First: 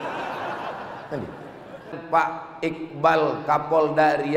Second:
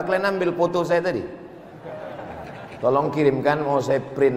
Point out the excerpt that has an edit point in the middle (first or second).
first